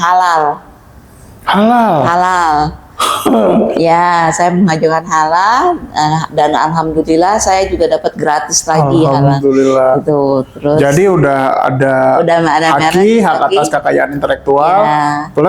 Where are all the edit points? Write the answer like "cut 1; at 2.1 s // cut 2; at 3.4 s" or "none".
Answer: none